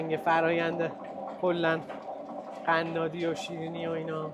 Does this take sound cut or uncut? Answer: uncut